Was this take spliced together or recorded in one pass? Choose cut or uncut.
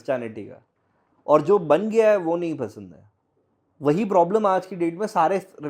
uncut